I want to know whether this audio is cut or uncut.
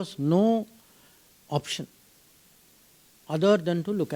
uncut